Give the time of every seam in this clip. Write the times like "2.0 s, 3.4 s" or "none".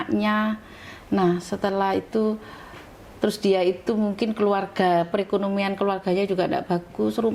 none